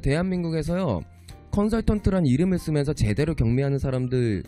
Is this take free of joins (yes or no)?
yes